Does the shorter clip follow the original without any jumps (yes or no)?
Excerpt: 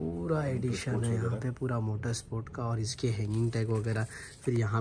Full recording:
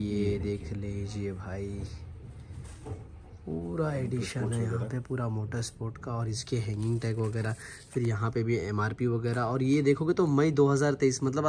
yes